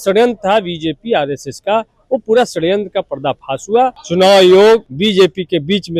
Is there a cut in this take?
yes; 2 cuts; at 4.0 s, 4.9 s

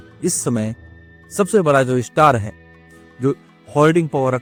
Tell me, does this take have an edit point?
no; 0 cuts

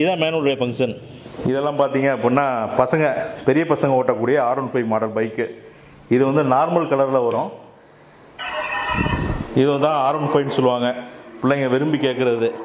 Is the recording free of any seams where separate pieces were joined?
no; 1 cut; at 1.4 s

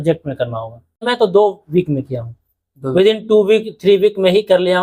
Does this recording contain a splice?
yes; 1 cut; at 1.0 s

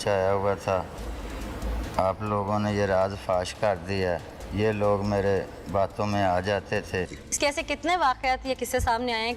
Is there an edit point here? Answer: yes; 1 cut; at 7.1 s

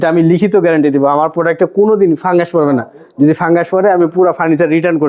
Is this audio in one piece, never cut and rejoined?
yes; 0 cuts

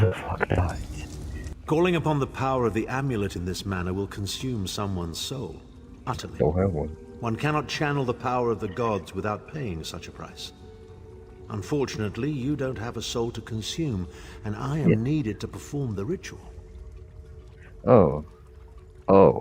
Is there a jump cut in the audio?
yes; 1 cut; at 1.5 s

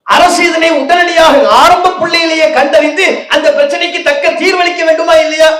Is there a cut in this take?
no; 0 cuts

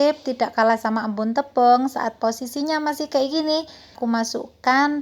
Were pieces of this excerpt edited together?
yes; 1 cut; at 4.0 s

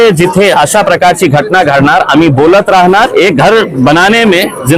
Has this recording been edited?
yes; 1 cut; at 3.1 s

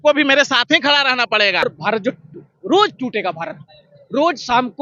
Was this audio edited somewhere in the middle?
yes; 1 cut; at 1.6 s

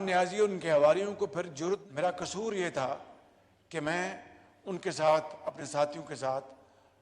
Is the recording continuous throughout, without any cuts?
no; 1 cut; at 1.8 s

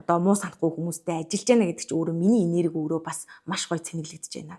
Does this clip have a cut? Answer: no; 0 cuts

